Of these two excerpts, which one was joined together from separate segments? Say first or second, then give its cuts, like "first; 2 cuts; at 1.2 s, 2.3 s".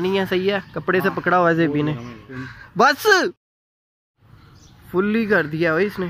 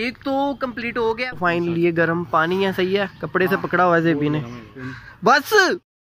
second; 1 cut; at 1.1 s